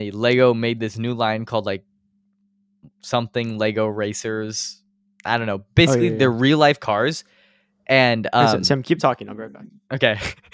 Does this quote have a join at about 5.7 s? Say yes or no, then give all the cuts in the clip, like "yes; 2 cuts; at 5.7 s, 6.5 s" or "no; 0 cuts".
no; 0 cuts